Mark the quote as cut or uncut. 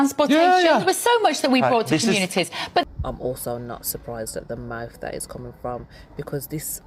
uncut